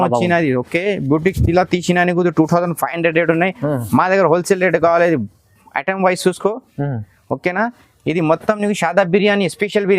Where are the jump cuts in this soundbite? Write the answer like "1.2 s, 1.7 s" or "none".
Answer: none